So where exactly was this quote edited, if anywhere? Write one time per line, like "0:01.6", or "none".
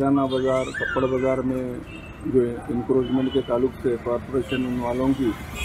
none